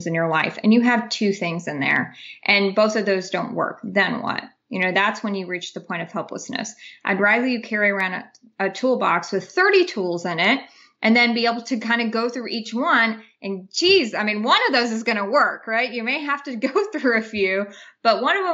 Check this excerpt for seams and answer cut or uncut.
uncut